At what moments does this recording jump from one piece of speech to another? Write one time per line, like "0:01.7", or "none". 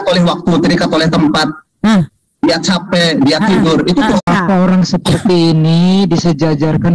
0:04.2